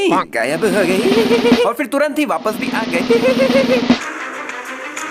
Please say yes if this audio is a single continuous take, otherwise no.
no